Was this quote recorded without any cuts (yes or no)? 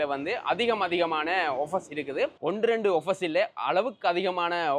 yes